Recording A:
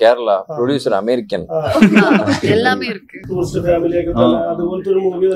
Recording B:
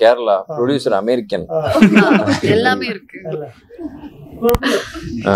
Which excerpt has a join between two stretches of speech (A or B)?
A